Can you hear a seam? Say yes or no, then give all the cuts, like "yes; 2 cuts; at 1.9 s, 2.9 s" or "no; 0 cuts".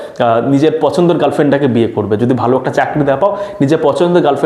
no; 0 cuts